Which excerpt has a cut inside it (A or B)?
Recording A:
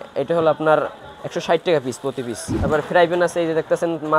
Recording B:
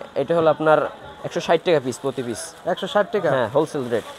A